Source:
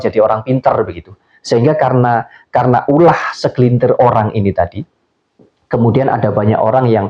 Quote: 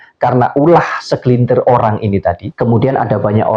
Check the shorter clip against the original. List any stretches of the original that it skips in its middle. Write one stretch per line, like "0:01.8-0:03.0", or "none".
0:04.8-0:05.6